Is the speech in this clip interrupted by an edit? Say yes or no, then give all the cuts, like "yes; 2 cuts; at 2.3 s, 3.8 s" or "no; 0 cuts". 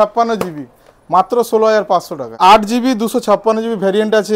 yes; 1 cut; at 2.4 s